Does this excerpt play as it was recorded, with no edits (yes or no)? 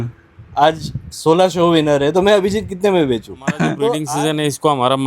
no